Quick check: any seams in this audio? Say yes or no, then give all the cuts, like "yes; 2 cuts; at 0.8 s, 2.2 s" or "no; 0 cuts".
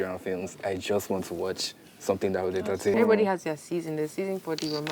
yes; 1 cut; at 2.9 s